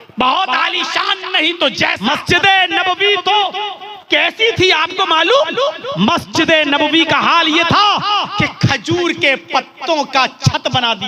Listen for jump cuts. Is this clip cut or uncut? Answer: cut